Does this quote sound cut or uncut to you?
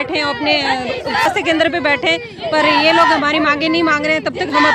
cut